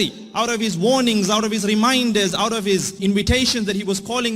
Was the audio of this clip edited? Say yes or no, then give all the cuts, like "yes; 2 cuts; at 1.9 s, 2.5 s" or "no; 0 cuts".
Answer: yes; 1 cut; at 2.9 s